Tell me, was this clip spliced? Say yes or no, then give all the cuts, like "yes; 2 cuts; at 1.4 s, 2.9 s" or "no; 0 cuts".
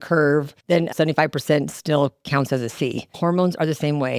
yes; 2 cuts; at 0.9 s, 3.0 s